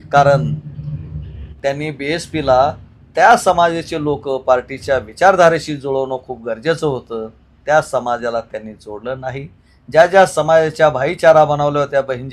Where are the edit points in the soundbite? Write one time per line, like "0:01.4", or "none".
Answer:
0:01.5

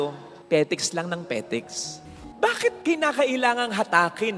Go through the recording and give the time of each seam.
0:02.1

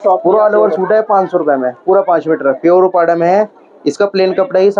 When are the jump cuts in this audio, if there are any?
none

